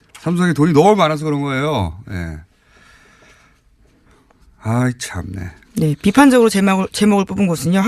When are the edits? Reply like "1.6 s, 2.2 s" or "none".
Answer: 5.7 s